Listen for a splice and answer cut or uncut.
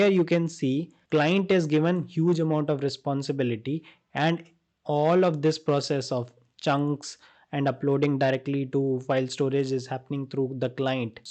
uncut